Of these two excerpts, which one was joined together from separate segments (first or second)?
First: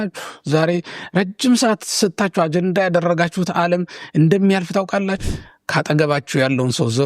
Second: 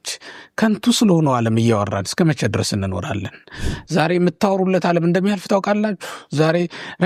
first